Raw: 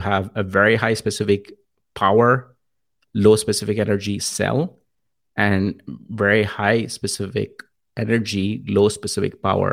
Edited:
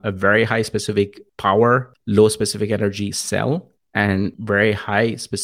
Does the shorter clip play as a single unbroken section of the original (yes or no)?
no